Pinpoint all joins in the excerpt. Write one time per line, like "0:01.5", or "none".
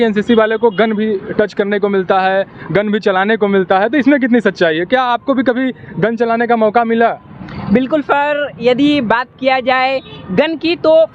none